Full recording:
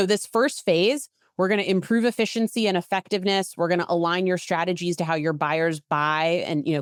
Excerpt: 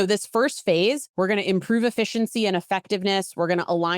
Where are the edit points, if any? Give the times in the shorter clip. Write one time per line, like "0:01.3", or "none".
0:01.1